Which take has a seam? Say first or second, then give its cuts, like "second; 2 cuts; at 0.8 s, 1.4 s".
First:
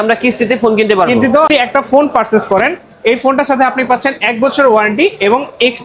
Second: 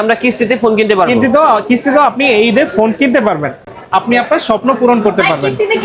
first; 1 cut; at 1.5 s